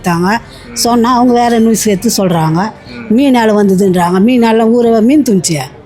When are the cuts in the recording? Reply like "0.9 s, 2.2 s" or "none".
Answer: none